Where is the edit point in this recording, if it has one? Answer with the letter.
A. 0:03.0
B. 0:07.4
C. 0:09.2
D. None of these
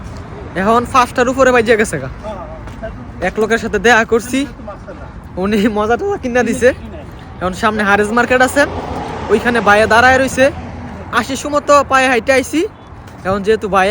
D